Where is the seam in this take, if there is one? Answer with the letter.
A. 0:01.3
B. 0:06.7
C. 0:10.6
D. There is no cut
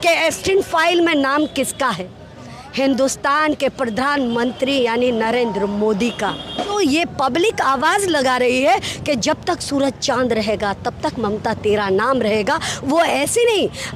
B